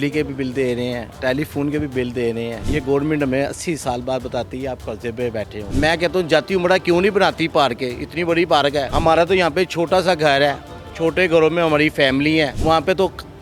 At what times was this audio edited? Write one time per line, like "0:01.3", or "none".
0:02.6
0:05.6
0:08.9
0:12.6